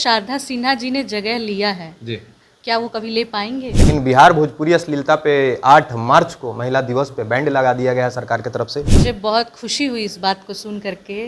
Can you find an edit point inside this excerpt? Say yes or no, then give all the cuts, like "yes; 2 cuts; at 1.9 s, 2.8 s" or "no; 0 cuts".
yes; 2 cuts; at 3.7 s, 8.9 s